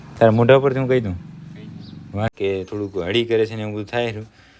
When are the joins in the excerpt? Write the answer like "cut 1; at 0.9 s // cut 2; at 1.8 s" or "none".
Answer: cut 1; at 2.3 s